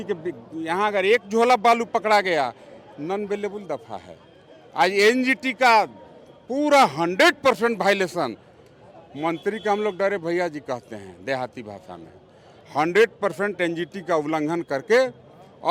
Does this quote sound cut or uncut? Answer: uncut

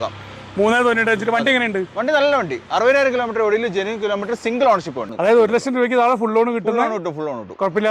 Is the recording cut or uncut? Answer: cut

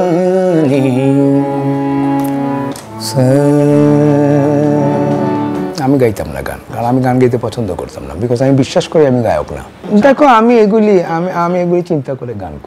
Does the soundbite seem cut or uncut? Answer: cut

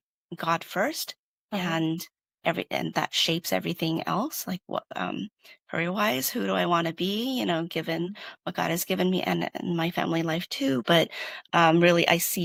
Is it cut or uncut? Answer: uncut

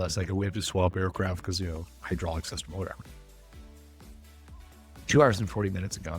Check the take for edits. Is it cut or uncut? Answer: cut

